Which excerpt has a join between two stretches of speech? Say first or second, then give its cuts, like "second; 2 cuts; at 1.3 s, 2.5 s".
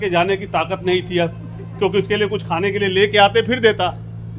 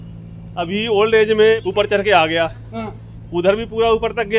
second; 1 cut; at 1.7 s